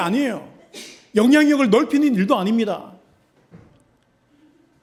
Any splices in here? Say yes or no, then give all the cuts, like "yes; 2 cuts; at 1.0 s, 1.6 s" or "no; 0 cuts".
no; 0 cuts